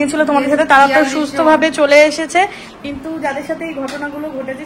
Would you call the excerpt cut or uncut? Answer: uncut